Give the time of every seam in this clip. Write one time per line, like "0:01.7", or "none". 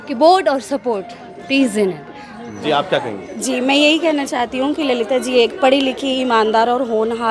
0:02.5